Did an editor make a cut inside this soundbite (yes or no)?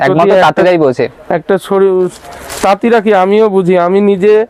no